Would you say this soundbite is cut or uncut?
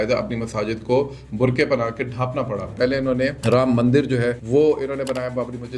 cut